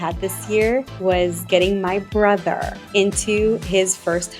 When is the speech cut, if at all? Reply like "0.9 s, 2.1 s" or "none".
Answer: 0.9 s, 2.7 s